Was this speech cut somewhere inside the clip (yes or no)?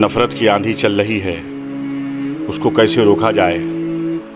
yes